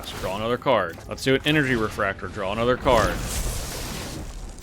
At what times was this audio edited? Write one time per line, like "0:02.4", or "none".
0:01.0